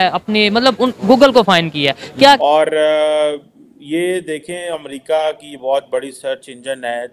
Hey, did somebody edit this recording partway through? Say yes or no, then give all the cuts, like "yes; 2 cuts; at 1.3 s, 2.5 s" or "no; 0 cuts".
yes; 1 cut; at 2.4 s